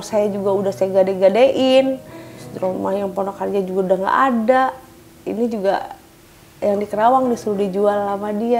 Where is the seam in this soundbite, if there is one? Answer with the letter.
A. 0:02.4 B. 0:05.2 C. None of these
A